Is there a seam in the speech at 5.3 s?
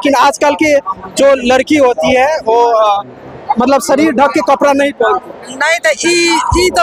no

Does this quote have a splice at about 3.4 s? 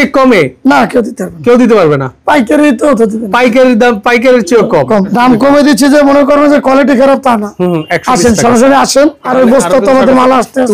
no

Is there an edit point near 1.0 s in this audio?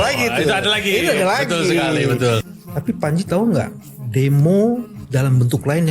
no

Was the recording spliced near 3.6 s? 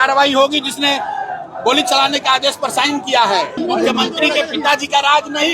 yes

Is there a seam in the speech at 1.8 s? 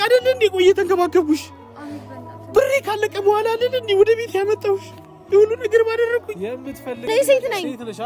no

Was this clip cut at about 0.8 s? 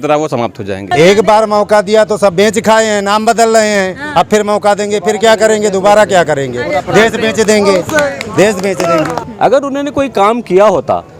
yes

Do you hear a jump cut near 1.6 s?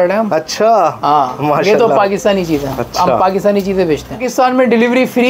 no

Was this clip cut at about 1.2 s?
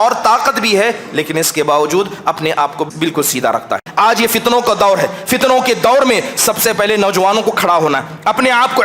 no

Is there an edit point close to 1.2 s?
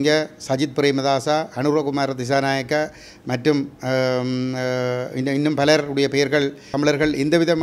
no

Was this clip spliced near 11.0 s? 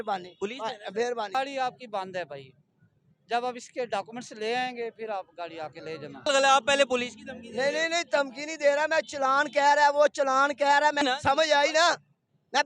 yes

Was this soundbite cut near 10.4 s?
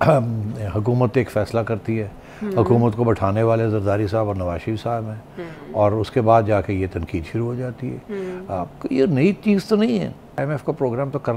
yes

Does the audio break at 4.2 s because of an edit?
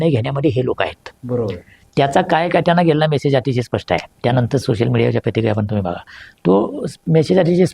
no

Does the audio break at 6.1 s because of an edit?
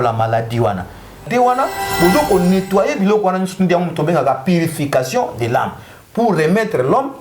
no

